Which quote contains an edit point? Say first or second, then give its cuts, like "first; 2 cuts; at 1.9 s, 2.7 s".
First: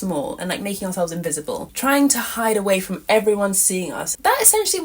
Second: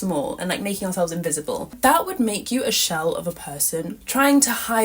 second; 2 cuts; at 1.7 s, 4.0 s